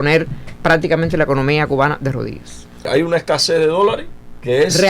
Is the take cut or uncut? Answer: cut